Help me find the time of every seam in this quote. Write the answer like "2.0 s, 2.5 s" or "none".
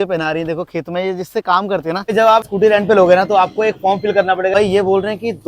2.4 s, 4.5 s